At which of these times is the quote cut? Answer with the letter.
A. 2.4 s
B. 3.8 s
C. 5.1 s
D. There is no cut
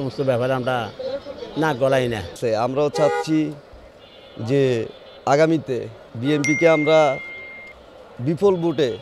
A